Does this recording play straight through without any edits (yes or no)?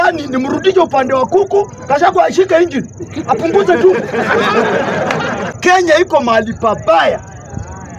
no